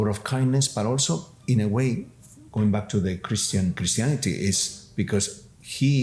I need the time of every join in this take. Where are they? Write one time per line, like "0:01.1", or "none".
0:03.8